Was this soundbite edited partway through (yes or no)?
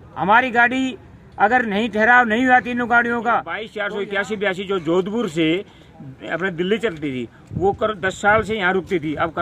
yes